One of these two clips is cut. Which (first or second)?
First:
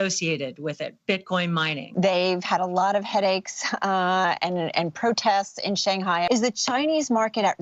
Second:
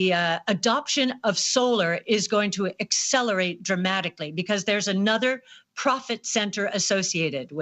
first